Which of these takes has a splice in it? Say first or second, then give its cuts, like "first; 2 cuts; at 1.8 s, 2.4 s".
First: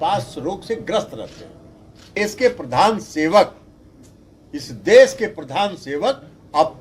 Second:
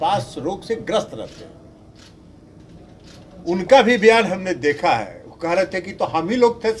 first; 1 cut; at 2.2 s